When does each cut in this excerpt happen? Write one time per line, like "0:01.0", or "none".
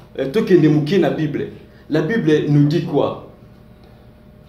none